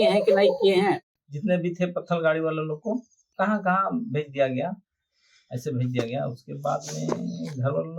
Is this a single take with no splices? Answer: no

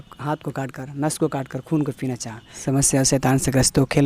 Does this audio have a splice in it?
yes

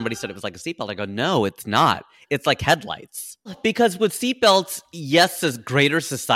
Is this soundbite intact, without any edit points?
no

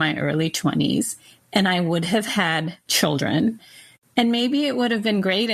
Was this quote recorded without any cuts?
no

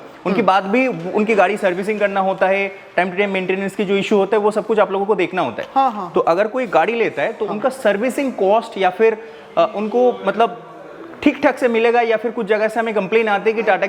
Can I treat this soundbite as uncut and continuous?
yes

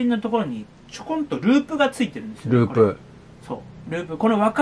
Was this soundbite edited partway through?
no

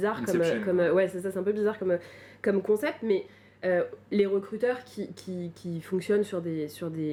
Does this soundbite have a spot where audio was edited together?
no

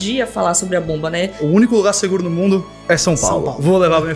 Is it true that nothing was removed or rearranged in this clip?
no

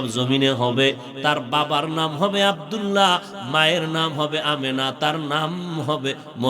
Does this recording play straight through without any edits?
no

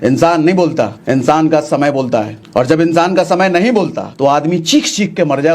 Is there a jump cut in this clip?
yes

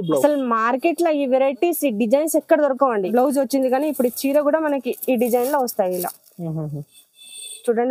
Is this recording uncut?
no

